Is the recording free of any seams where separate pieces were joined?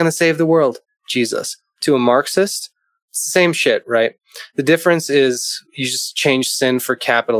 yes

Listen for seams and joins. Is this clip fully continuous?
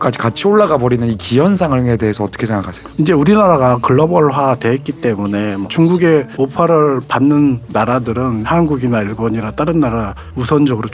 no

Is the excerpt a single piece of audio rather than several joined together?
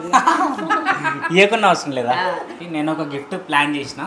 no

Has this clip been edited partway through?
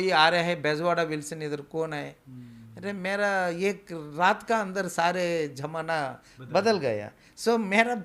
no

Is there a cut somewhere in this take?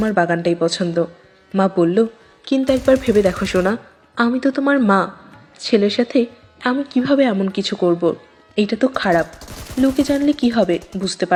no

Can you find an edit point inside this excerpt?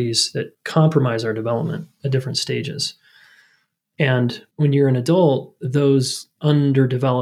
yes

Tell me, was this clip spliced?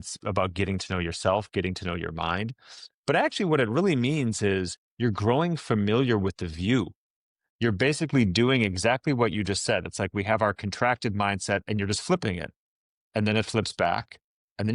no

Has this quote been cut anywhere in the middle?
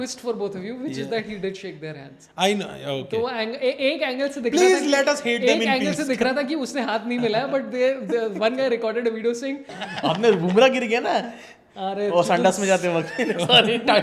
yes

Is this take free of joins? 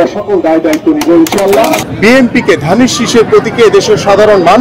no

